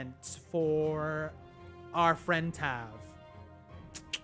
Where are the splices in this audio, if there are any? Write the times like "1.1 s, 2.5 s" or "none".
3.3 s